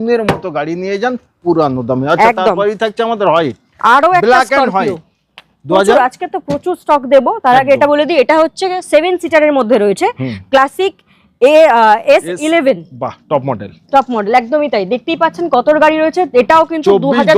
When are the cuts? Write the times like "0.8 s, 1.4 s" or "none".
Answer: none